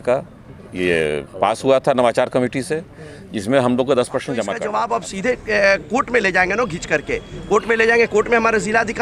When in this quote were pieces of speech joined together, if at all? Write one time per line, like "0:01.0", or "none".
0:04.6